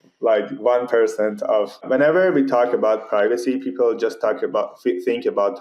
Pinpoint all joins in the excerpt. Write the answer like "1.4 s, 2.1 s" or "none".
1.8 s